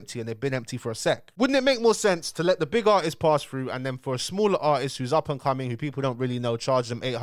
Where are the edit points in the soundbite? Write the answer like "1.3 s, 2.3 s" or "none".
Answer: none